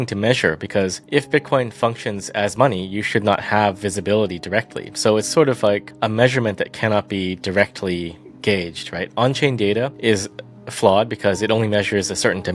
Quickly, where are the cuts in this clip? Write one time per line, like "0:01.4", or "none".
0:01.0
0:05.9
0:09.9